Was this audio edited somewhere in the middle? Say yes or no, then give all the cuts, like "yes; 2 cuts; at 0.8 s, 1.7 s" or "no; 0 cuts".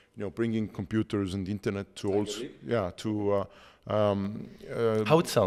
no; 0 cuts